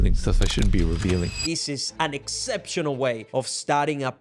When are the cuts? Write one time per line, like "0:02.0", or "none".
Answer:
0:01.4
0:03.2